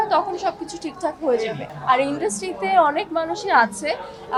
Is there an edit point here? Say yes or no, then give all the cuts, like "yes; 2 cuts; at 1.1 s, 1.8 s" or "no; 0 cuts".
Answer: no; 0 cuts